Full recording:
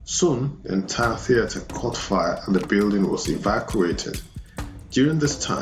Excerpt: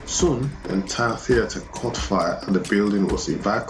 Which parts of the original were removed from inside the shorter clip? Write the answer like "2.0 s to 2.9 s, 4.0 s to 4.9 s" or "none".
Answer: none